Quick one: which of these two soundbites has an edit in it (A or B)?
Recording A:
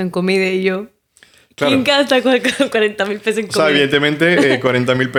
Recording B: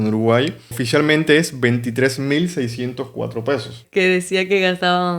B